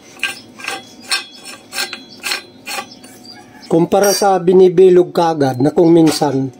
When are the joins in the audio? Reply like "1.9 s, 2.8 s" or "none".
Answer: 3.6 s